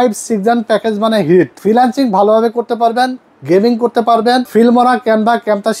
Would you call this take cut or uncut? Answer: cut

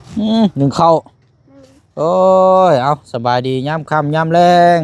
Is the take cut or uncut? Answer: uncut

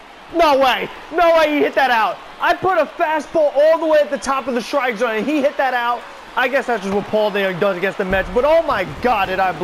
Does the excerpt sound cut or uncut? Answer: uncut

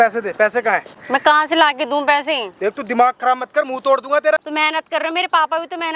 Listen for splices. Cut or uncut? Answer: cut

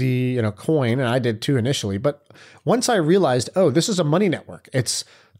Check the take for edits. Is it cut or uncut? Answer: uncut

